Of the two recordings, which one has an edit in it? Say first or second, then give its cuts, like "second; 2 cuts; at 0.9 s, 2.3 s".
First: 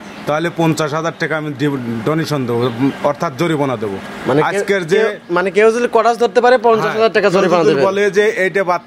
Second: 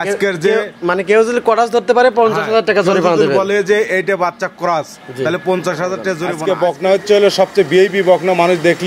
second; 1 cut; at 6.3 s